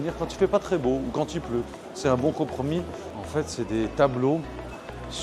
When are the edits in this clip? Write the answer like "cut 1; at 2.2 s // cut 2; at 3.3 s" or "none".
cut 1; at 3.0 s